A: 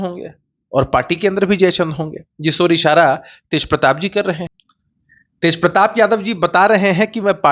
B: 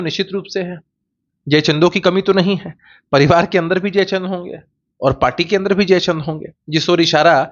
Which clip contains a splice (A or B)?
A